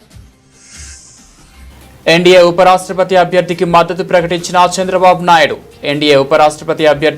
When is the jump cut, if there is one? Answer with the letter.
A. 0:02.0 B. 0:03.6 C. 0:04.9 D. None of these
A